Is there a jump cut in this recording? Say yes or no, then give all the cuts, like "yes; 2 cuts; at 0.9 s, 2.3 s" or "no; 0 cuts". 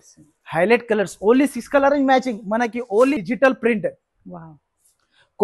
yes; 1 cut; at 3.2 s